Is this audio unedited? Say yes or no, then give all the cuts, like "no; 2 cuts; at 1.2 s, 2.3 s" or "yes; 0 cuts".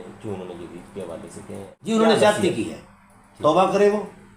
no; 1 cut; at 1.9 s